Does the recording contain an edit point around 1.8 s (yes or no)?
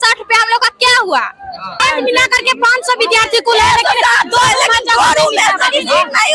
yes